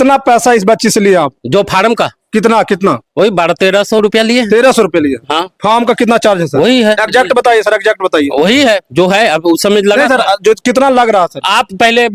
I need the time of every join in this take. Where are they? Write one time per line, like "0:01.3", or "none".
none